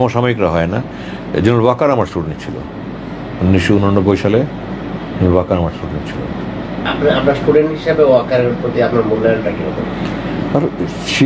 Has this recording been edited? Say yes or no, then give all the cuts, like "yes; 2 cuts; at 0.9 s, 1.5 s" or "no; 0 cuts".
no; 0 cuts